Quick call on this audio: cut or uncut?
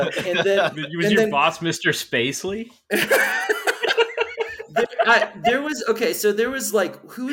uncut